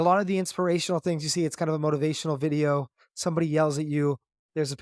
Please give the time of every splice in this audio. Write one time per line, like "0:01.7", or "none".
none